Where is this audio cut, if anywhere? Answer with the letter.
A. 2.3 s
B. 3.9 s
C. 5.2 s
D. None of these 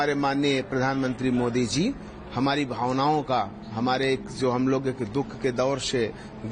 D